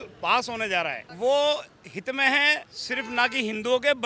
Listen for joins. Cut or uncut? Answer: cut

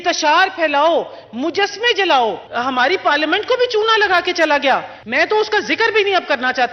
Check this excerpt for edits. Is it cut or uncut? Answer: cut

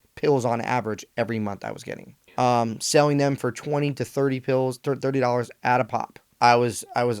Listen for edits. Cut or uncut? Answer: cut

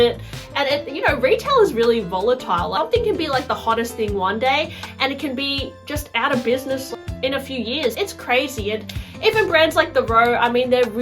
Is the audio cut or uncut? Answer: cut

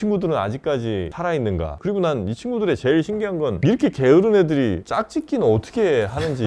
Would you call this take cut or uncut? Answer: uncut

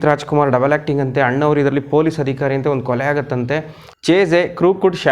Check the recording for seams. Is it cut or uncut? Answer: cut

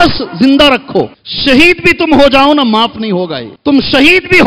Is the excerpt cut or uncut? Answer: cut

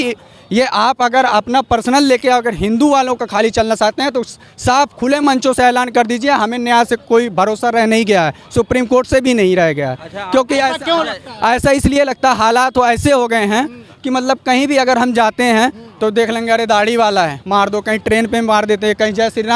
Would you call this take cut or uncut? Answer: uncut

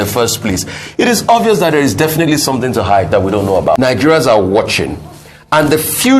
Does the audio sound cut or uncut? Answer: cut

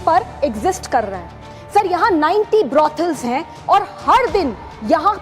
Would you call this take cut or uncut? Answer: uncut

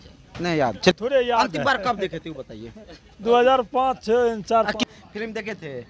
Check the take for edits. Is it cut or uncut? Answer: cut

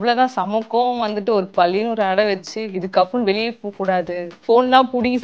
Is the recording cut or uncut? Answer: cut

